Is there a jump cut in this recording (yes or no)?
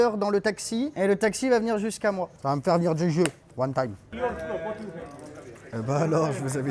yes